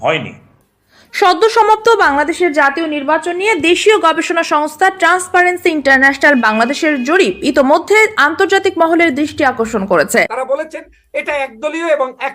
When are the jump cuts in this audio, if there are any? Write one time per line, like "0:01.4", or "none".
0:10.4